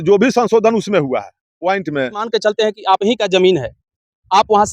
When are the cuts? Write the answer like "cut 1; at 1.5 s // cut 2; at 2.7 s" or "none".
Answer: cut 1; at 2.3 s